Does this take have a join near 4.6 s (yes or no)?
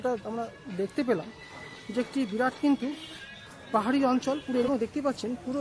yes